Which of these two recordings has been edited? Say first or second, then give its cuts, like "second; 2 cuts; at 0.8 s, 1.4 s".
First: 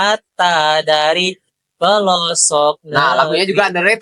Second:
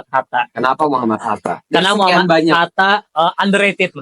second; 1 cut; at 3.1 s